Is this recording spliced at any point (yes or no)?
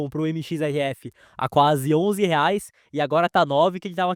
no